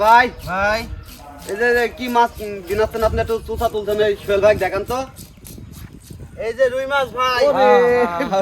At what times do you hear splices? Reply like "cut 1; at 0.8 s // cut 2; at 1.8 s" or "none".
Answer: none